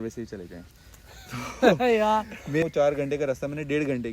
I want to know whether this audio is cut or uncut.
cut